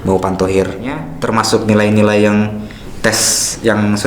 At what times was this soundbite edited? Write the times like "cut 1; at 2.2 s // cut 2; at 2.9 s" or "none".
cut 1; at 1.2 s